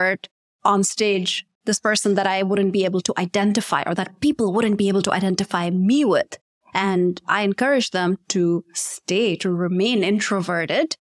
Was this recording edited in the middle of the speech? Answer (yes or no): no